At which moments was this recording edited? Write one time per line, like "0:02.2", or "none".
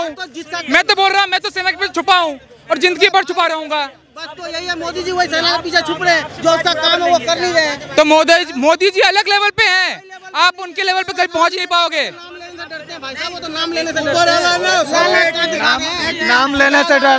none